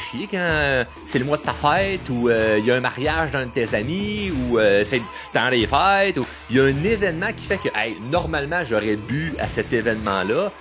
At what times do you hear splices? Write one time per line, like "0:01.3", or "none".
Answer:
none